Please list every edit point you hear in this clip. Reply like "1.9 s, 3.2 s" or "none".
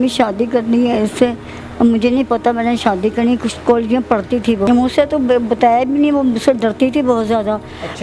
4.7 s